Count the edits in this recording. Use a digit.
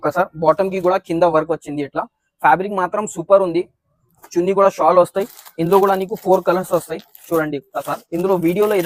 0